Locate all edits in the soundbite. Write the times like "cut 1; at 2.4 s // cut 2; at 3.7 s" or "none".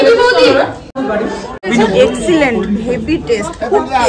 cut 1; at 1.0 s